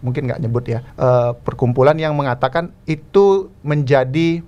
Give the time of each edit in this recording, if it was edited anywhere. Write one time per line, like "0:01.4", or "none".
0:00.9
0:01.4